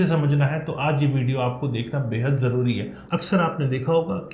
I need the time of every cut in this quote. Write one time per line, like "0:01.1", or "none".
0:02.9

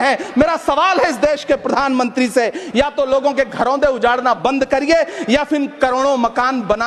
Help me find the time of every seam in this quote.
none

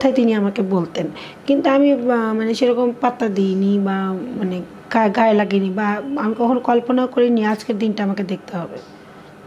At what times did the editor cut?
none

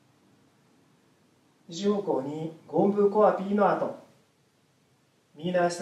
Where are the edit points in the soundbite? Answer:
0:01.3

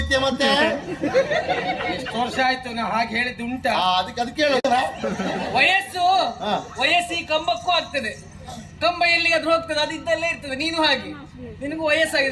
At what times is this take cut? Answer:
0:04.6

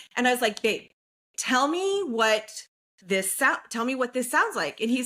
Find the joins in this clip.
none

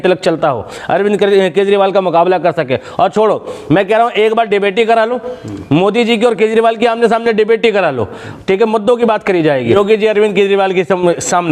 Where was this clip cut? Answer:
0:09.7

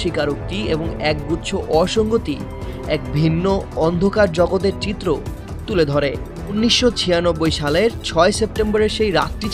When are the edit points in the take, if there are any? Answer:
0:06.6

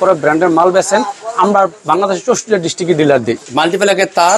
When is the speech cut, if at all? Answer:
0:03.4

